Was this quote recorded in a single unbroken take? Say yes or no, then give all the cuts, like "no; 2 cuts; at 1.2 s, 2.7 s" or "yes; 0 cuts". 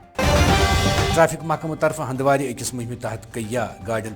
no; 1 cut; at 0.9 s